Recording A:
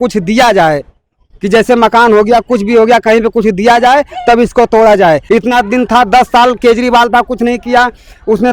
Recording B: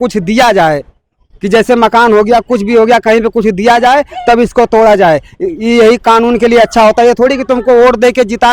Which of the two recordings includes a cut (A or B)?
A